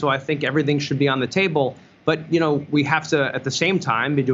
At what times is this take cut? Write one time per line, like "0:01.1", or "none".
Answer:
none